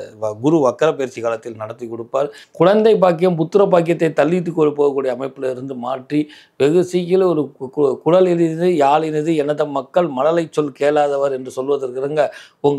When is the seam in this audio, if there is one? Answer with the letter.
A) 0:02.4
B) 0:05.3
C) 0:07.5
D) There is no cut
A